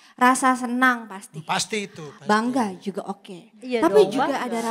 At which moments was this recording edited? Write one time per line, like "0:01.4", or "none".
none